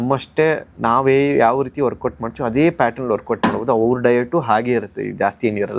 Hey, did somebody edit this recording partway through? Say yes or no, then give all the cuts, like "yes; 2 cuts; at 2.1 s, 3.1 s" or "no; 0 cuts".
no; 0 cuts